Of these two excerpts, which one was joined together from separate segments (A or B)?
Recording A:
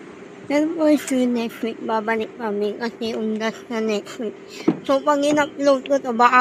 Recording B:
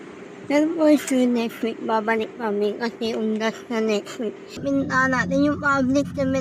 B